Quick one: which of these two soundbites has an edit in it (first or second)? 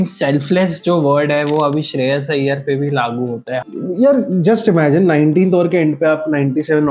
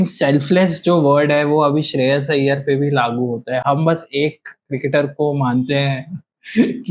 first